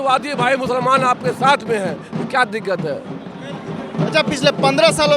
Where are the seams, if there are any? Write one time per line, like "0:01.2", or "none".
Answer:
none